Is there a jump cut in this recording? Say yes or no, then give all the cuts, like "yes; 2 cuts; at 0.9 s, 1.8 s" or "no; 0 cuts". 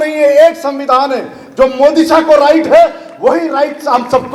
no; 0 cuts